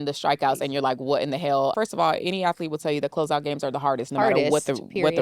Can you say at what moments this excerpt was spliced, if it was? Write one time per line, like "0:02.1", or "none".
0:01.7